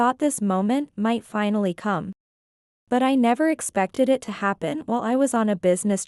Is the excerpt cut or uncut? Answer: uncut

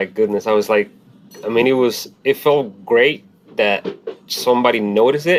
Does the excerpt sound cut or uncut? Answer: uncut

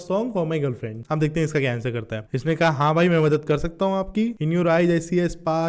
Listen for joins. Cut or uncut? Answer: cut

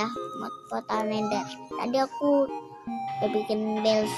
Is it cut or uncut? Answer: uncut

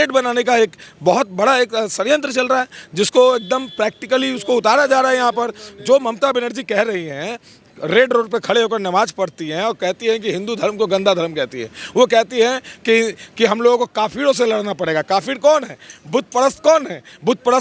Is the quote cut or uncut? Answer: uncut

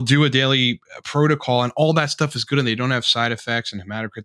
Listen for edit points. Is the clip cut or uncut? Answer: uncut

